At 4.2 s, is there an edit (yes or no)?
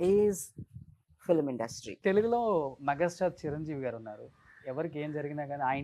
no